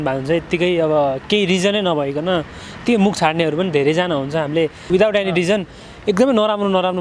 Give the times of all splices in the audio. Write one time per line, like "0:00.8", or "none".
0:04.9